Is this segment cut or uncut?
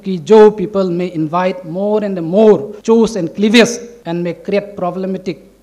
cut